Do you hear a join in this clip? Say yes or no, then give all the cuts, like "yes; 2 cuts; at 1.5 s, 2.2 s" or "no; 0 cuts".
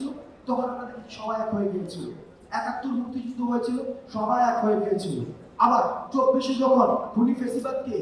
no; 0 cuts